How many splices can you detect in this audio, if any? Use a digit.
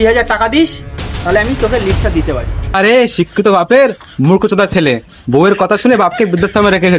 1